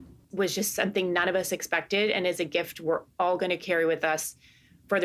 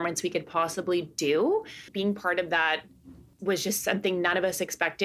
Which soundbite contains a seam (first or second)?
second